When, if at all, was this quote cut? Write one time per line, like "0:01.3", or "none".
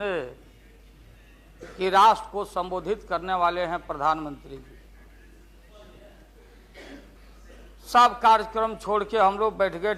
0:07.2